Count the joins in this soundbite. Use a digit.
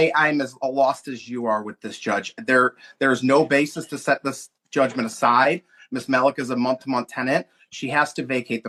0